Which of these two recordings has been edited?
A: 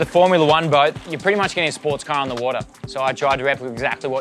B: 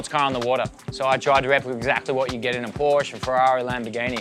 A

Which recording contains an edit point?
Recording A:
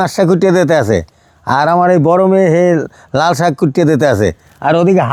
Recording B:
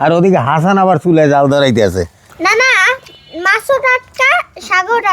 B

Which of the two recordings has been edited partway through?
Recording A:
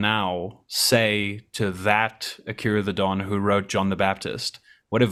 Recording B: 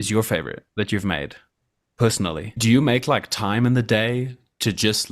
B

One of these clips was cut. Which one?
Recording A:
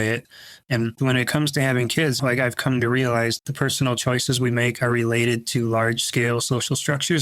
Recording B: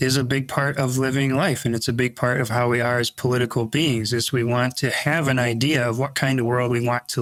A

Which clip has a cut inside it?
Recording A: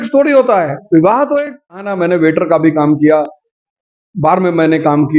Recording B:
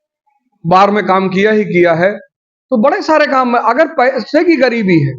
A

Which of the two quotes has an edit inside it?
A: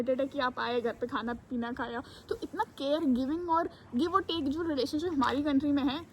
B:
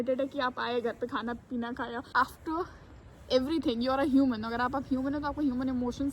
B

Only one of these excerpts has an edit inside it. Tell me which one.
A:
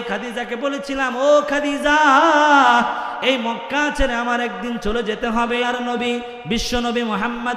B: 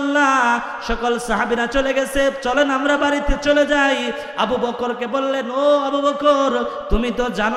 A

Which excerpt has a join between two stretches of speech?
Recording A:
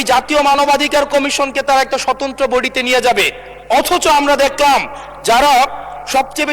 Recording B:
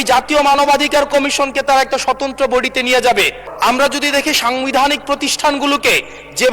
B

